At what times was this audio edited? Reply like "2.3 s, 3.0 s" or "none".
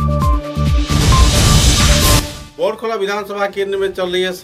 2.4 s